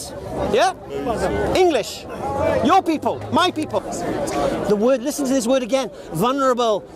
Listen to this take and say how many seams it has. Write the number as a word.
one